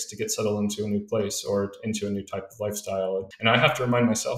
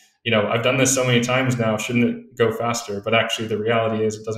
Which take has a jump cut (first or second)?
first